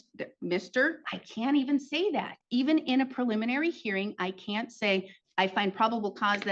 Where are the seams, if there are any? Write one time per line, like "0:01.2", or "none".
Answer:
0:01.0